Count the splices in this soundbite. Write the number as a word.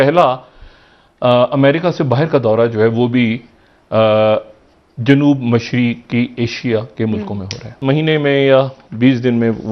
one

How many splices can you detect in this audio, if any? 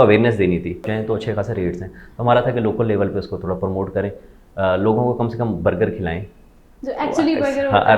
one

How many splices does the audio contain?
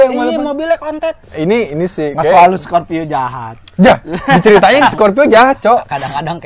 one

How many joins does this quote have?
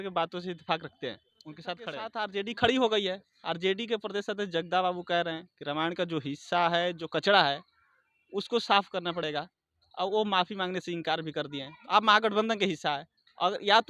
one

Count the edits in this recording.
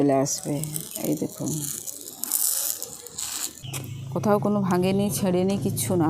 one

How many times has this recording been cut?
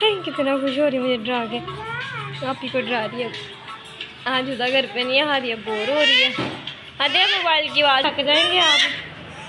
one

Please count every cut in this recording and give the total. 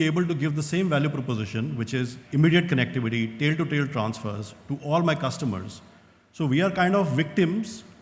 one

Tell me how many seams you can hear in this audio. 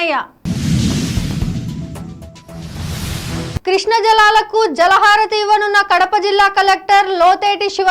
two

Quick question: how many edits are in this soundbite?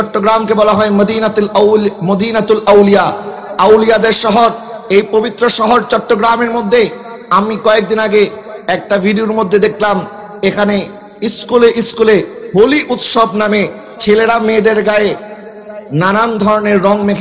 zero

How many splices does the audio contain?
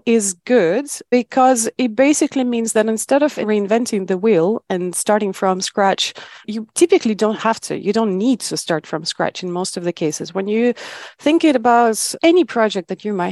one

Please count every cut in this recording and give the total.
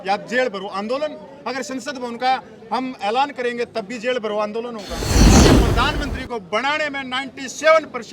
two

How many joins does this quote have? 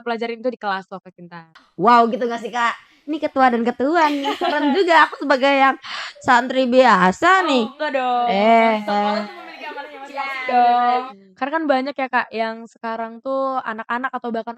two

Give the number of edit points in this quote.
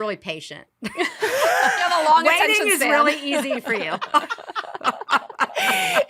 one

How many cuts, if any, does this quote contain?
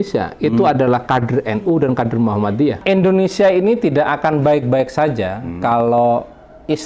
one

